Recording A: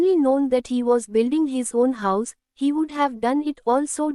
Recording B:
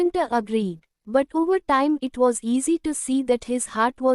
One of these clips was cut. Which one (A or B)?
B